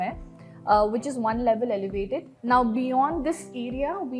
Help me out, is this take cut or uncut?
cut